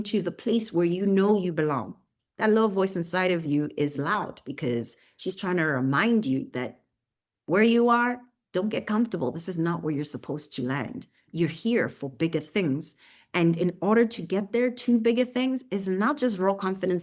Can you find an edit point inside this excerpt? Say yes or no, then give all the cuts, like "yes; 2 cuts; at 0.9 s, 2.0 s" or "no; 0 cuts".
yes; 1 cut; at 11.3 s